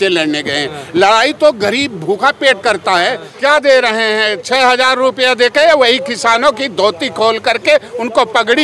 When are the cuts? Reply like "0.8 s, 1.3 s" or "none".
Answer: 3.3 s